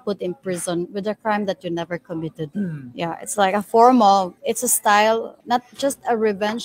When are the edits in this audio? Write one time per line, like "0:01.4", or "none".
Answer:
0:02.4
0:04.4
0:05.3

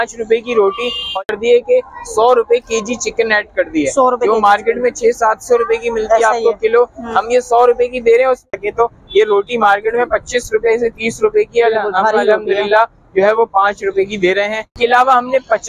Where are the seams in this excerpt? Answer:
0:01.2
0:08.4
0:14.6

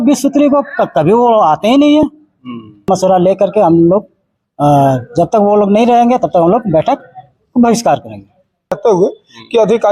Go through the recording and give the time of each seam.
0:02.9
0:08.8

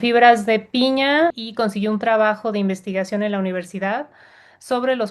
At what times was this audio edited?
0:01.4

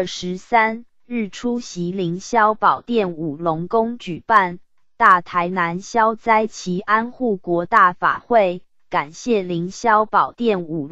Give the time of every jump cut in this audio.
0:00.9

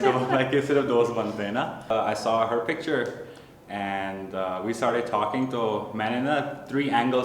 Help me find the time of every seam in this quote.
0:01.9

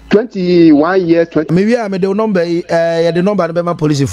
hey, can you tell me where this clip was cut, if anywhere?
0:01.5

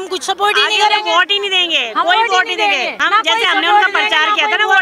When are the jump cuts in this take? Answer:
0:02.9

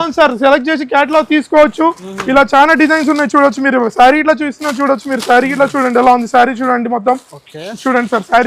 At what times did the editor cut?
none

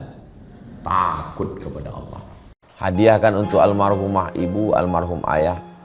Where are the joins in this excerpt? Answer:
0:02.6

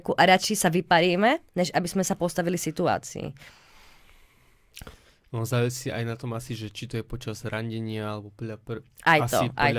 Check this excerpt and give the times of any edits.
none

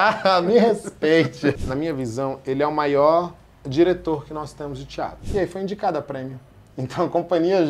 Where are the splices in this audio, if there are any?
0:01.6
0:05.2

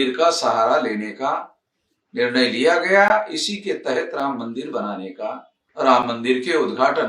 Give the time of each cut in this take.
0:05.6

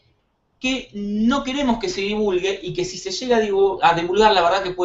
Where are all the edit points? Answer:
none

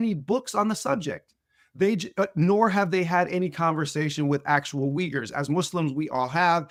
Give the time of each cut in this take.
none

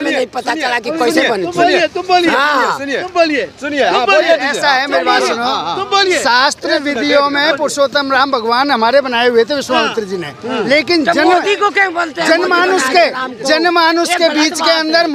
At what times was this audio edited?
none

